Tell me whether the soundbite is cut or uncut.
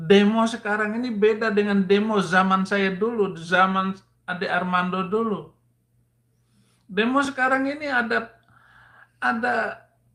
uncut